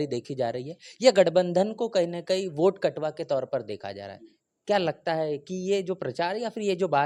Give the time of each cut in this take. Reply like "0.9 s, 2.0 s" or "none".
none